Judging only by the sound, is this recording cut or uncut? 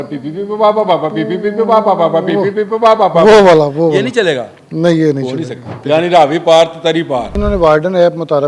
cut